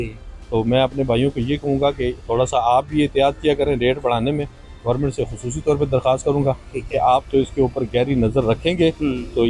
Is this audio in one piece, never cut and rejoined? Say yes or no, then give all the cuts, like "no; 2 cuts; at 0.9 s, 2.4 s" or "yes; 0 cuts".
yes; 0 cuts